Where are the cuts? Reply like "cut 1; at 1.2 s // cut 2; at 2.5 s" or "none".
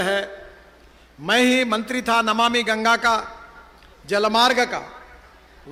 none